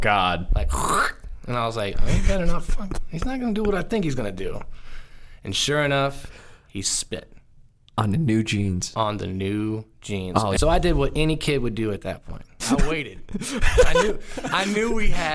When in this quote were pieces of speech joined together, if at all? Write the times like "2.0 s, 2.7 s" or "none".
10.5 s, 12.6 s